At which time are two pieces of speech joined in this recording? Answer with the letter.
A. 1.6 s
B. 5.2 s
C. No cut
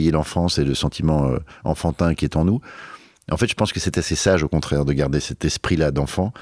B